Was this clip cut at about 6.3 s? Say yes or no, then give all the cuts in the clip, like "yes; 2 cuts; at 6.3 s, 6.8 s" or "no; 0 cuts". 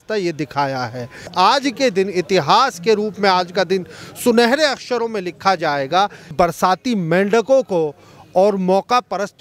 yes; 2 cuts; at 1.3 s, 6.3 s